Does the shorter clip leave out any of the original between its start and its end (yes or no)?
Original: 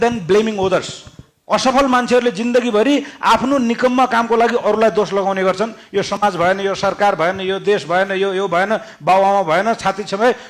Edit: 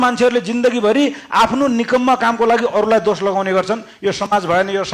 no